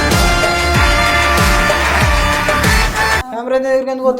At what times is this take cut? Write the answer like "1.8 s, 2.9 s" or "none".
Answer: none